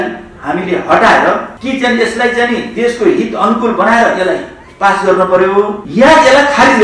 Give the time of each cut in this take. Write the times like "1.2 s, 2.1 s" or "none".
1.5 s, 5.8 s

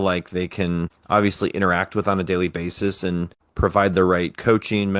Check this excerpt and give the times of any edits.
0.9 s, 3.4 s

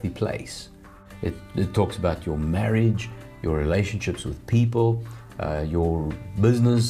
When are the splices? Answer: 1.1 s

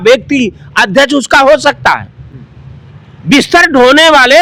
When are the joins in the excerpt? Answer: none

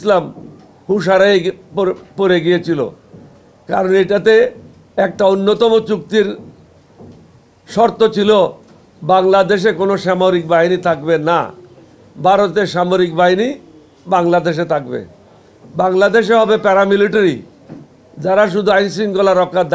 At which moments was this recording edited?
none

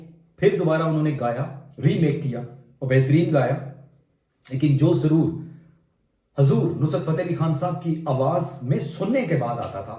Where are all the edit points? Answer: none

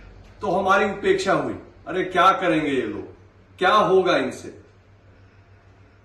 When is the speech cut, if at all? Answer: none

